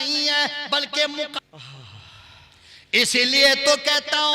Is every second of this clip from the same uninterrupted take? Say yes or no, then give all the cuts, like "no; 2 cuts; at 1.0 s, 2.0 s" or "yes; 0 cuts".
no; 1 cut; at 1.4 s